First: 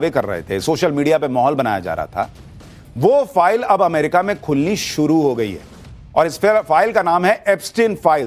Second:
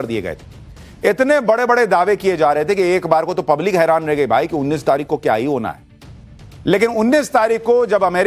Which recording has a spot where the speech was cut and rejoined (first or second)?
second